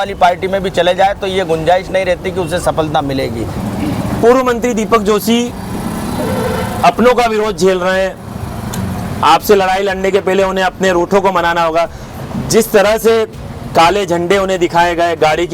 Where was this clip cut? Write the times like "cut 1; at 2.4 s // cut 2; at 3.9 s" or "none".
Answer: cut 1; at 3.6 s